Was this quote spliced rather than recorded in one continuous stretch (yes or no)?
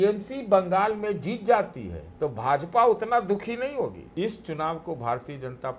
yes